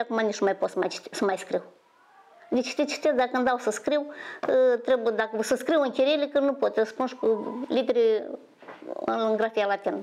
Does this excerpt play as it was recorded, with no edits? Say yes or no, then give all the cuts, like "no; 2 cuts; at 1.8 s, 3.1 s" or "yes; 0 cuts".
yes; 0 cuts